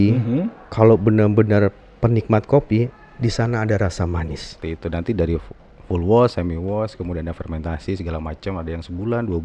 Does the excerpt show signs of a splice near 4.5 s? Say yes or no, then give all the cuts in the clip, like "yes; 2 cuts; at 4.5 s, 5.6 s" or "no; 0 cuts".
yes; 1 cut; at 4.5 s